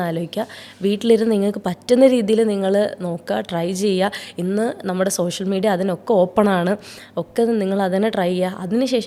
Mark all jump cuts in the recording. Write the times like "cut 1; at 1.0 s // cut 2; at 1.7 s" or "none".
none

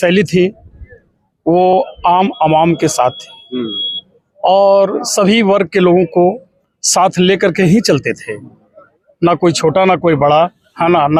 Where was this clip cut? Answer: none

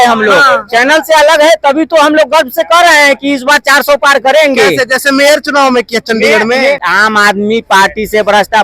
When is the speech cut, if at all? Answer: cut 1; at 6.8 s

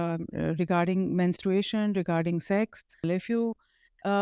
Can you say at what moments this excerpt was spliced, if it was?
cut 1; at 3.1 s

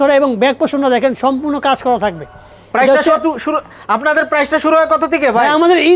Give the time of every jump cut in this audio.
none

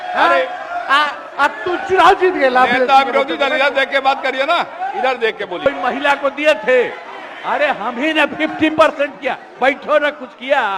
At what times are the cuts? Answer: cut 1; at 5.7 s

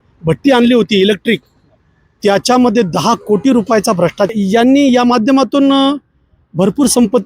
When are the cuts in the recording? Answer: cut 1; at 4.3 s

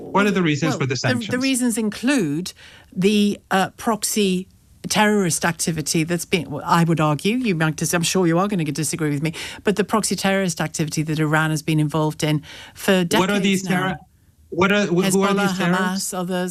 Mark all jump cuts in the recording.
none

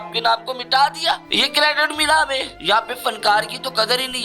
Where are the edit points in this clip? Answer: cut 1; at 1.3 s // cut 2; at 2.5 s

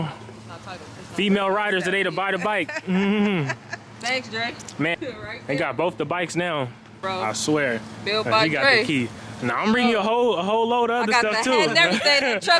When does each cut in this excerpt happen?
cut 1; at 4.9 s // cut 2; at 7.0 s

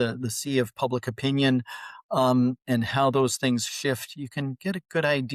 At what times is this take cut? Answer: none

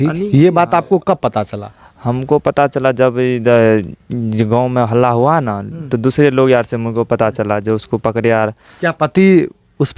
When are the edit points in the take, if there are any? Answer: none

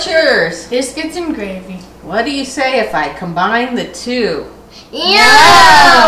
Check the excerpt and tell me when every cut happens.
none

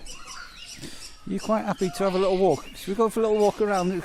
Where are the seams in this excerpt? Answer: none

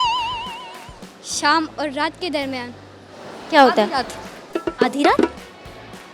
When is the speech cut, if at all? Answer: none

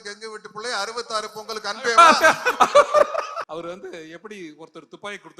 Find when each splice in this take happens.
cut 1; at 3.4 s

